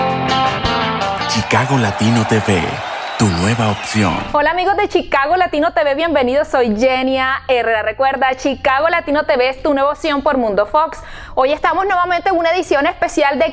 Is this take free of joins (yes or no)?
no